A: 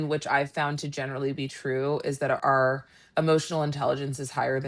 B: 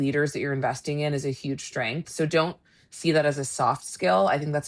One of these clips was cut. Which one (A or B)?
A